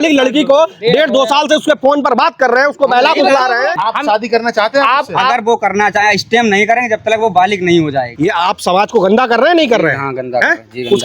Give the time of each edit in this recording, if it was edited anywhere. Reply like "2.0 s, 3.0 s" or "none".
3.7 s, 8.1 s